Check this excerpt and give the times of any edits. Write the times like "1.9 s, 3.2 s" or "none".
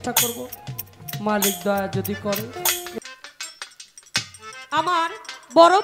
3.0 s